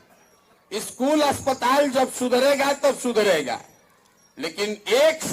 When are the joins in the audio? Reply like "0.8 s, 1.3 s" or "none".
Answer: none